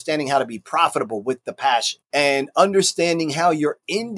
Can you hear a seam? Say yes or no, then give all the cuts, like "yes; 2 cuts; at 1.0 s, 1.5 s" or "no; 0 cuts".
yes; 1 cut; at 2.0 s